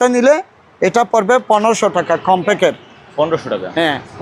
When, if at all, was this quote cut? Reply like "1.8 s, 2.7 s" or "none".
none